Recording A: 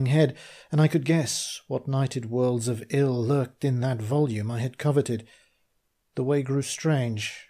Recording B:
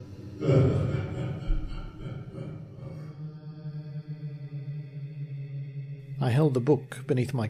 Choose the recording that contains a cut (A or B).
A